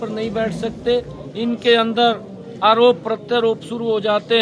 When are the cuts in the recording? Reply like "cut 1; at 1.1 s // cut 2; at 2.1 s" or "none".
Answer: none